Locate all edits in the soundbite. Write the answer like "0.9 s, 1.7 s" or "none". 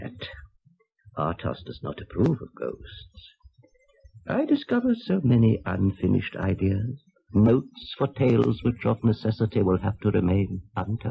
5.6 s